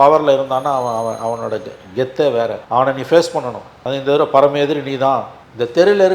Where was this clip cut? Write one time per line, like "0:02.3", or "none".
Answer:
0:02.6